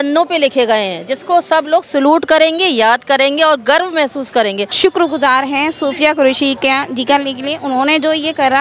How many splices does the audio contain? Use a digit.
1